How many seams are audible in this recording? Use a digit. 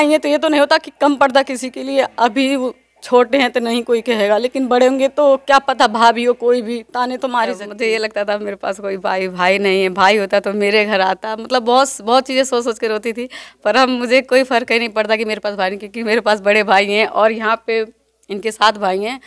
1